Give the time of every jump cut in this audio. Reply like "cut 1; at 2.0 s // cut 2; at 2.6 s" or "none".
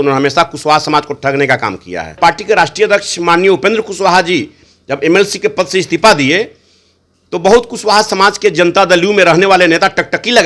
cut 1; at 2.2 s